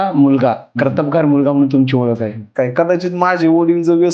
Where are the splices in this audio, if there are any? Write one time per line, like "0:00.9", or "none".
0:02.5